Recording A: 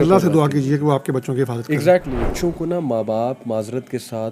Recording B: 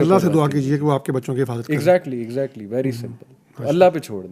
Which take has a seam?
A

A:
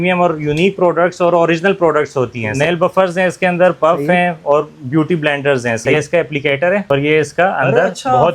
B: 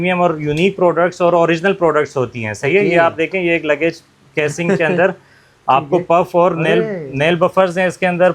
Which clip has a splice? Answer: A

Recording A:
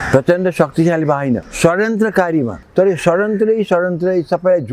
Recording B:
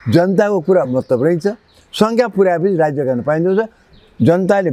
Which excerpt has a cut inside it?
A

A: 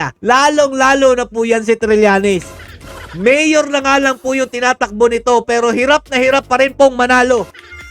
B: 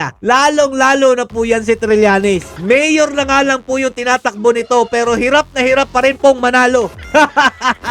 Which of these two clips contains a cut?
B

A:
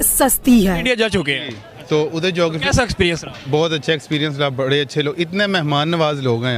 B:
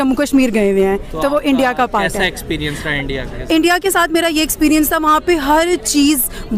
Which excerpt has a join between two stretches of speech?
A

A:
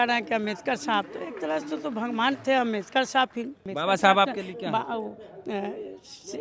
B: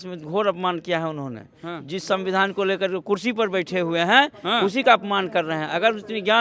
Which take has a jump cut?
A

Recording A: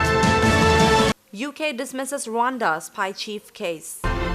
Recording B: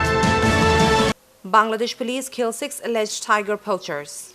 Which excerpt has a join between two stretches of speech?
A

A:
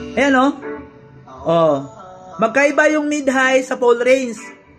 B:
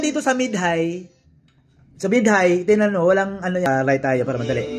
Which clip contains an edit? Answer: B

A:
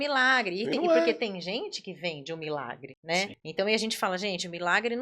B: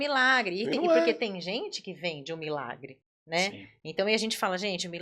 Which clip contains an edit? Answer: A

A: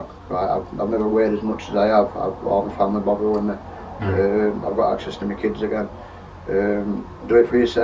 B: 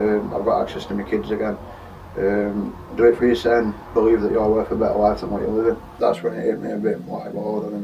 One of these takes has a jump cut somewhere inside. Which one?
B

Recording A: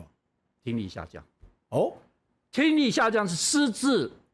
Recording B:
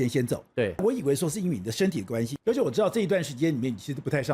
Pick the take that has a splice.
B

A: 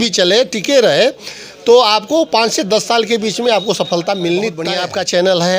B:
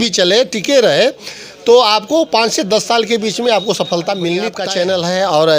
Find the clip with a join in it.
B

